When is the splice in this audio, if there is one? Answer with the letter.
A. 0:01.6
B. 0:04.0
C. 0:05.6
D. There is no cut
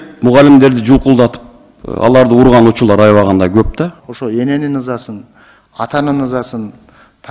B